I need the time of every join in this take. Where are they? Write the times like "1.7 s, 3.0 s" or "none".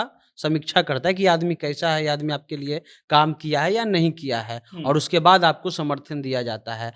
none